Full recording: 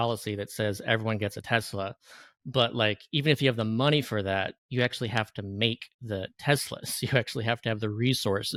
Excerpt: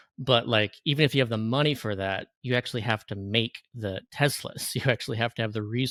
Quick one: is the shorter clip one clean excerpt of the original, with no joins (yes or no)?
yes